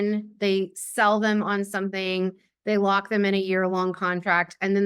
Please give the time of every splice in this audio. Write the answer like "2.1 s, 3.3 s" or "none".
none